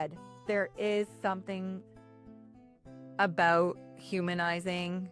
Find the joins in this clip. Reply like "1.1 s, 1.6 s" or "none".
none